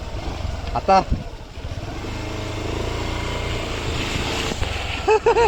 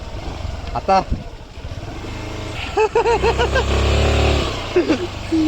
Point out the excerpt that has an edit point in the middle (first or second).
second